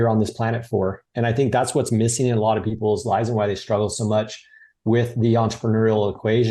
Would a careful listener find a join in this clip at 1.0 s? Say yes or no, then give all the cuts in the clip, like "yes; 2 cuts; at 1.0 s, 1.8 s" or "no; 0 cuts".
yes; 1 cut; at 1.0 s